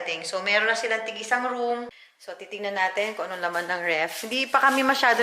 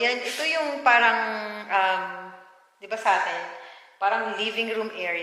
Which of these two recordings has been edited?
first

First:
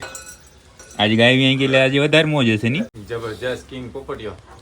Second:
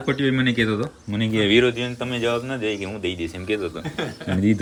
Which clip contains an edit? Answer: first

